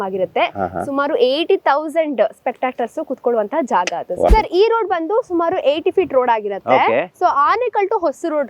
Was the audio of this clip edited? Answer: yes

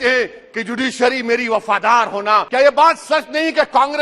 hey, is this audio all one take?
no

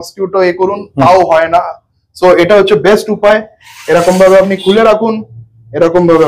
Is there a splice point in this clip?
no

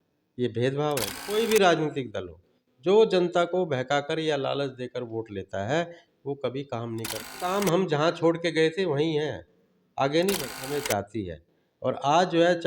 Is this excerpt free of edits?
no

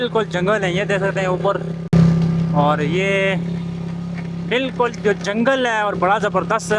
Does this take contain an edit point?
no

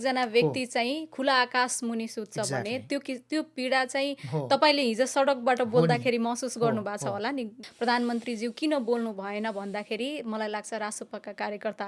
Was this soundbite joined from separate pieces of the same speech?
yes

